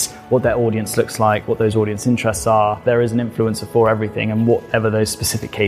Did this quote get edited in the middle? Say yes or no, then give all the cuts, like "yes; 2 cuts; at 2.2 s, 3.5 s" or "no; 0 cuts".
yes; 1 cut; at 2.8 s